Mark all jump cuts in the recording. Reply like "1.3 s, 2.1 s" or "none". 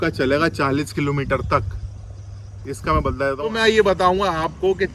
3.4 s